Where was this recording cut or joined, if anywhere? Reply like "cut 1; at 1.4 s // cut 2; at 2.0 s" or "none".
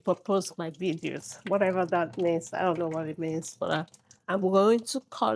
none